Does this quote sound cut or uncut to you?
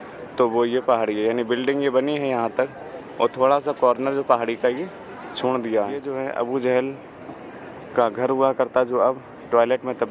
cut